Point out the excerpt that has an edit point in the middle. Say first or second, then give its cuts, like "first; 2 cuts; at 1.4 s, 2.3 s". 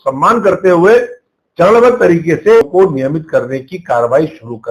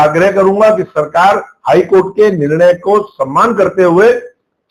first; 1 cut; at 2.7 s